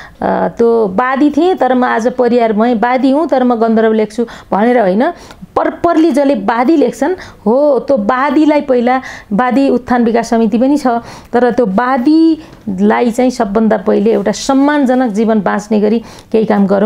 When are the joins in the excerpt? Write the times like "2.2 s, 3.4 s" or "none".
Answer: none